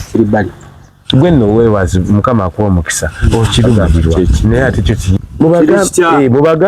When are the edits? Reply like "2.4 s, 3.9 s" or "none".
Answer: 5.2 s